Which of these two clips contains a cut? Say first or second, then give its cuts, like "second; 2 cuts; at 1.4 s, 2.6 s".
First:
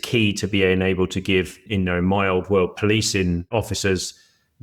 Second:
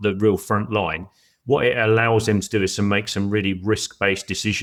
first; 2 cuts; at 1.7 s, 3.5 s